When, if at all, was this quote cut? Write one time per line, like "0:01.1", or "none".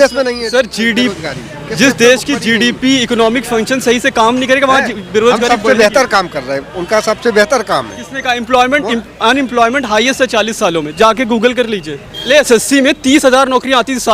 0:12.3